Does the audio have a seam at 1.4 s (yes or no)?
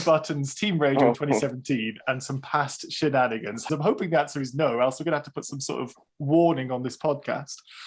no